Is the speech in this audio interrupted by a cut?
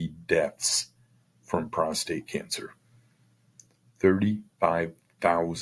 no; 0 cuts

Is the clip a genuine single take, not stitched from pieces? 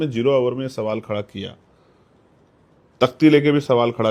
yes; 0 cuts

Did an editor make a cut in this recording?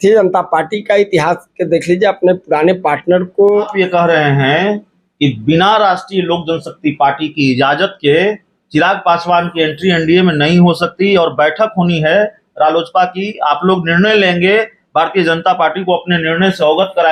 yes; 1 cut; at 3.7 s

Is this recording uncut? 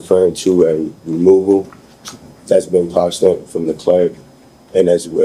yes; 0 cuts

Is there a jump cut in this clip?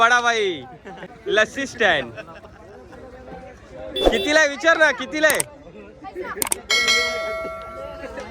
yes; 1 cut; at 1.0 s

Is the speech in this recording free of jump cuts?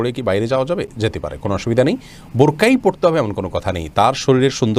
yes; 0 cuts

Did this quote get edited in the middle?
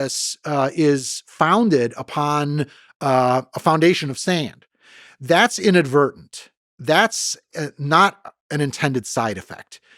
no; 0 cuts

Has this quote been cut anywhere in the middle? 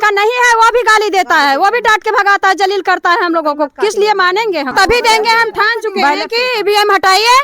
yes; 1 cut; at 4.7 s

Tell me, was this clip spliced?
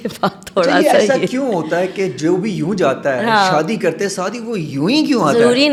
no; 0 cuts

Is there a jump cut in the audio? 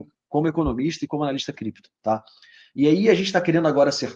no; 0 cuts

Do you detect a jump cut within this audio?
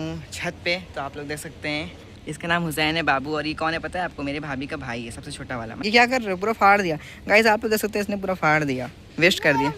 yes; 2 cuts; at 2.1 s, 5.8 s

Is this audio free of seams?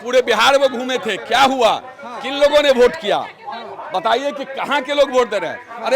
yes; 0 cuts

